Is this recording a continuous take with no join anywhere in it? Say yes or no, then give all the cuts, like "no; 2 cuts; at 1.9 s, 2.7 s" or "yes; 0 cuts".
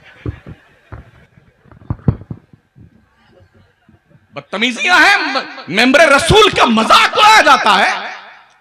yes; 0 cuts